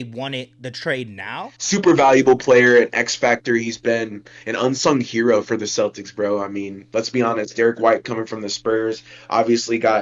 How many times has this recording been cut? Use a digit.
1